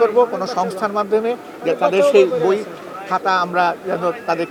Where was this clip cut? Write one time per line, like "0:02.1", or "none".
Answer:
none

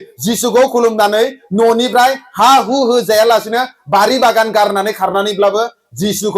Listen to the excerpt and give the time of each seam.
none

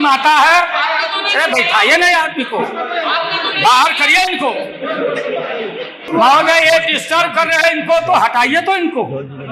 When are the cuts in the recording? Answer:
none

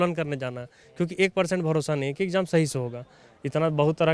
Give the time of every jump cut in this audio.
none

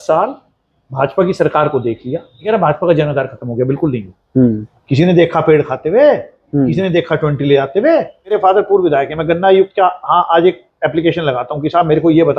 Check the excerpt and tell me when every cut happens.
0:02.5
0:04.7
0:08.3

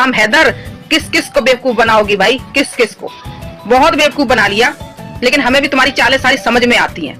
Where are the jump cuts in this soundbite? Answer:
none

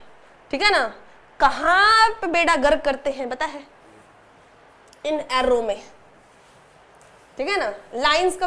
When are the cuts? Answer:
none

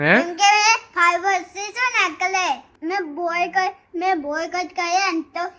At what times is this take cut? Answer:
0:02.7

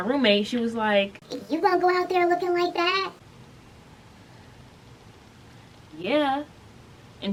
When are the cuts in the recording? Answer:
none

